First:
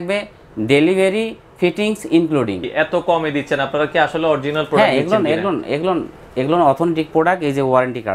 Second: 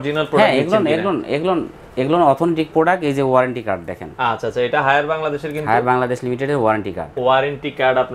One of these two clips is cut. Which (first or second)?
first